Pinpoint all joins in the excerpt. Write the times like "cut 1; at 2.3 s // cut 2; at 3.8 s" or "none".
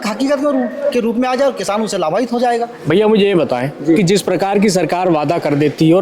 none